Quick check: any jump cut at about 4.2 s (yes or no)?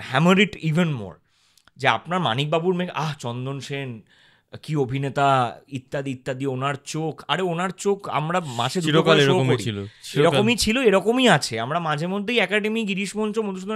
no